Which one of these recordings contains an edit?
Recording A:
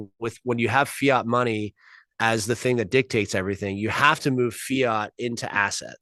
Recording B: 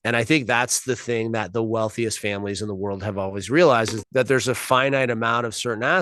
B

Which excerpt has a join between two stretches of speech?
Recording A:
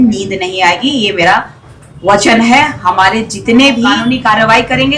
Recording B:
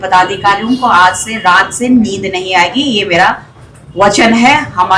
A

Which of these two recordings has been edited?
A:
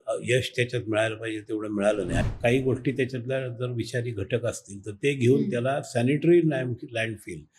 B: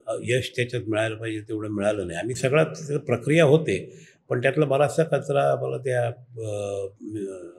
A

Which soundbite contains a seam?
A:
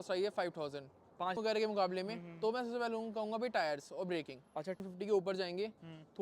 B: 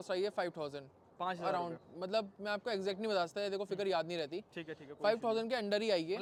A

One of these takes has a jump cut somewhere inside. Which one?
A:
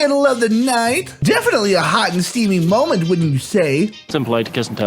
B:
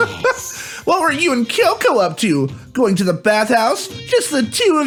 A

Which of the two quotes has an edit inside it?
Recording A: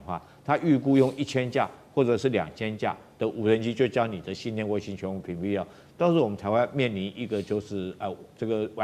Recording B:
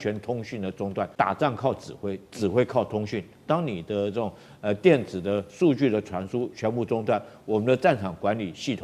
B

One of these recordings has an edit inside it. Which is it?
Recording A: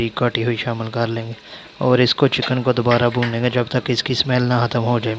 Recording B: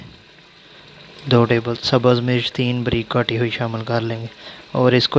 B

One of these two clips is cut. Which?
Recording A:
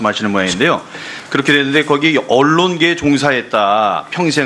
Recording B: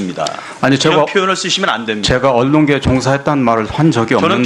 B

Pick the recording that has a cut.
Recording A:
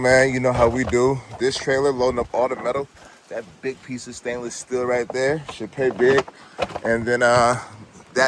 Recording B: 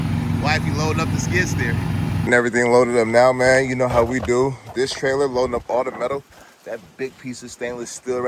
B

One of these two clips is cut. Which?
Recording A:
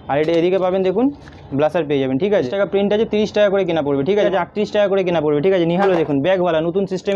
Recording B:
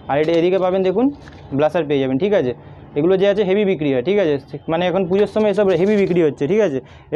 A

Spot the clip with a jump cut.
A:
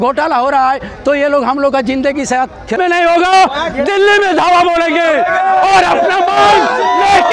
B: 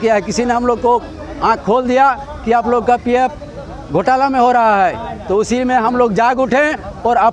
A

